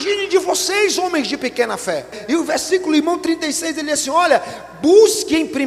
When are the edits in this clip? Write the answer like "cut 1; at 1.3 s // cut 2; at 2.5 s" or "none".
cut 1; at 2.2 s

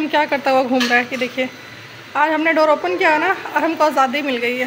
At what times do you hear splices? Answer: none

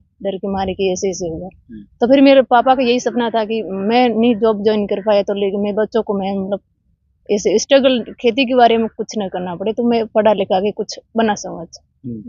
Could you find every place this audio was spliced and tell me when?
none

